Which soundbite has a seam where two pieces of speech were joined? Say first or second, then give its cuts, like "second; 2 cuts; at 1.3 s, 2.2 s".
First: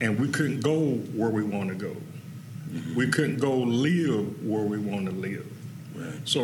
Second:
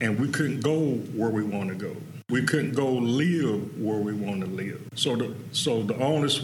second; 2 cuts; at 2.2 s, 4.9 s